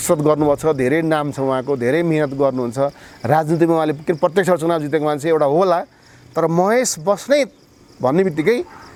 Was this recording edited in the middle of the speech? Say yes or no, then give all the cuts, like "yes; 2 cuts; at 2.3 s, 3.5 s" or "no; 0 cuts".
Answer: no; 0 cuts